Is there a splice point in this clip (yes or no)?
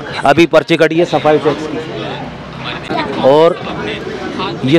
yes